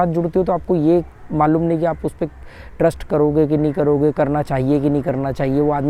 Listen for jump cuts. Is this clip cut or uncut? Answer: uncut